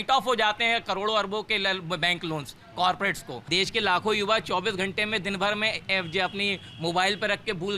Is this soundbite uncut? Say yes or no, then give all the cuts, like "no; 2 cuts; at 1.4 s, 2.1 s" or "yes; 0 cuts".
no; 1 cut; at 3.3 s